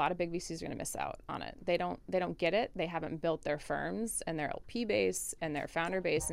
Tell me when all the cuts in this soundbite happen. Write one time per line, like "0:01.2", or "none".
none